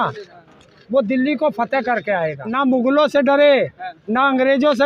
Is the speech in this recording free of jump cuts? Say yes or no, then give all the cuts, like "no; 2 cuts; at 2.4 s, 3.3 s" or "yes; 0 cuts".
no; 1 cut; at 2.4 s